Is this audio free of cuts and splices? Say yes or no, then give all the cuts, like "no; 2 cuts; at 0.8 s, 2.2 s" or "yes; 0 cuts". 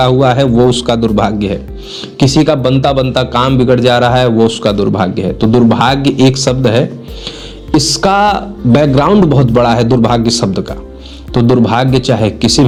yes; 0 cuts